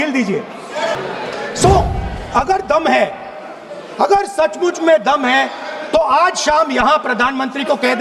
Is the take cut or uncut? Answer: cut